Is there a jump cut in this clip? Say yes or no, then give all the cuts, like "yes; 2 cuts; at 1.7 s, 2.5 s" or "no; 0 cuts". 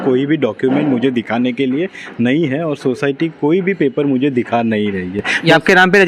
no; 0 cuts